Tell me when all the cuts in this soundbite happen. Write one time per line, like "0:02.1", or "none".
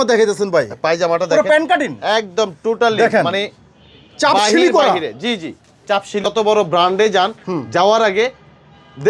0:06.2